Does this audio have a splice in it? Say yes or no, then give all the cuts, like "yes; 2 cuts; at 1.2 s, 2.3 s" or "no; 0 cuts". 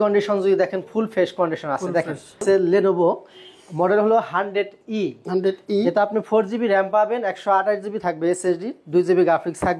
yes; 1 cut; at 2.4 s